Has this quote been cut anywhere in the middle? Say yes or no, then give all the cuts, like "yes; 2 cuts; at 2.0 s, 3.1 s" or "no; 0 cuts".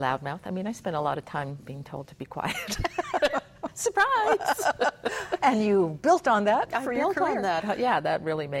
no; 0 cuts